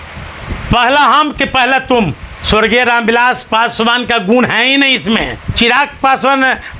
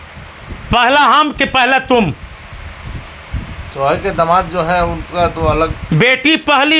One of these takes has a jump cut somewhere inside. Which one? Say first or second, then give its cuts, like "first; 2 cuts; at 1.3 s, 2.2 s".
first; 2 cuts; at 2.3 s, 5.5 s